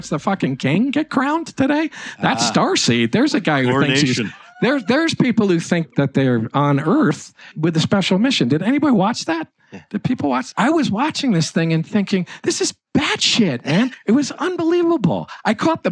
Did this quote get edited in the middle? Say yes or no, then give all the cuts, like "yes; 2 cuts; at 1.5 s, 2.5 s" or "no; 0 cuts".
yes; 4 cuts; at 5.9 s, 7.5 s, 10.5 s, 14.0 s